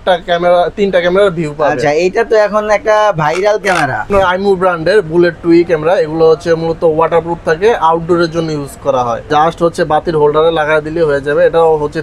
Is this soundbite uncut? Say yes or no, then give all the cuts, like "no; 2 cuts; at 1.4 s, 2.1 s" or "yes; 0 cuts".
no; 2 cuts; at 4.1 s, 9.3 s